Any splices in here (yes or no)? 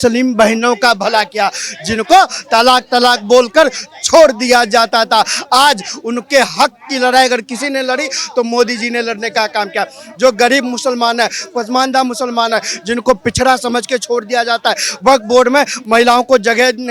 no